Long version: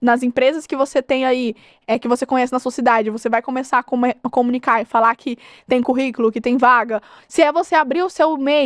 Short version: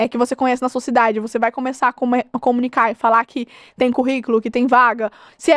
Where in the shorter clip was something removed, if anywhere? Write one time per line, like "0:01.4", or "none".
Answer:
none

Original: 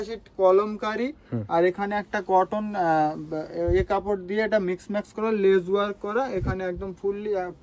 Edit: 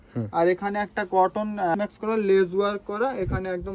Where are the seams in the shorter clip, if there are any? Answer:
0:01.7

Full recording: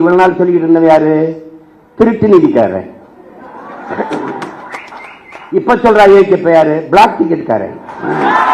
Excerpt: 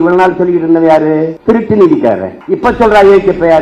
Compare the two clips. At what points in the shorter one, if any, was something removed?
0:01.3
0:02.3

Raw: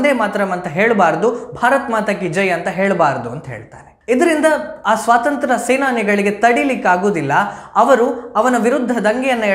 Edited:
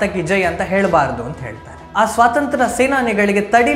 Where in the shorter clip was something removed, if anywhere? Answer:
0:01.8

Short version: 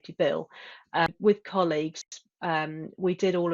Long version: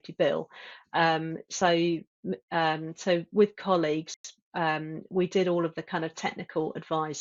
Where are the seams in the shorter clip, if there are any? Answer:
0:01.1

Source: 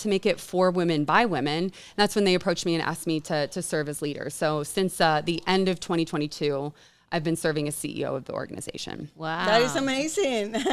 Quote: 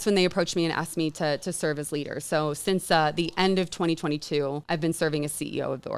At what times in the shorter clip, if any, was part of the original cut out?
0:04.6

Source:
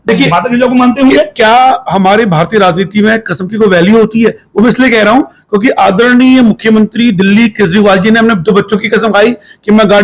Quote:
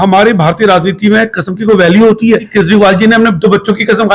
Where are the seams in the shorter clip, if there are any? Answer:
0:02.5

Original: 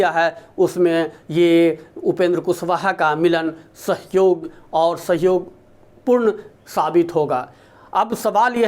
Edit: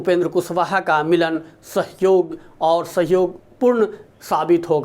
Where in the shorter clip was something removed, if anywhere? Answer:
0:03.4

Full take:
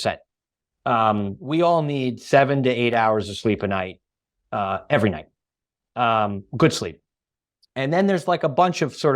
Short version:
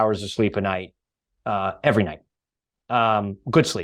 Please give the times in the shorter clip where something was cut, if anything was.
none

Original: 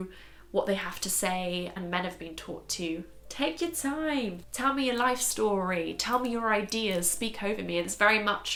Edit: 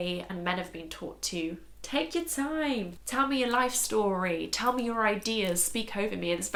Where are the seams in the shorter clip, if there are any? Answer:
none

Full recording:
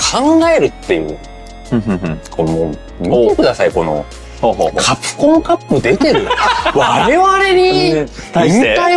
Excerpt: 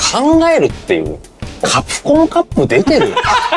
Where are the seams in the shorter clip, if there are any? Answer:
0:01.6

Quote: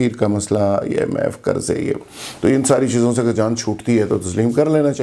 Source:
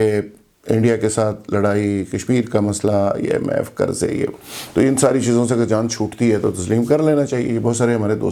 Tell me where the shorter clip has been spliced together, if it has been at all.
none

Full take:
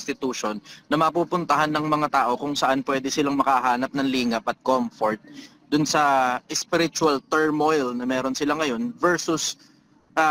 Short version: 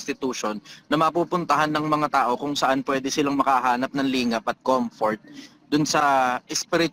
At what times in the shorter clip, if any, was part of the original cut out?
none

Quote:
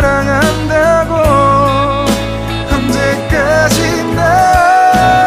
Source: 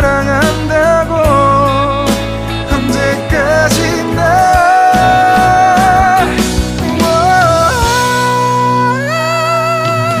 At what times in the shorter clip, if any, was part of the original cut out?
none

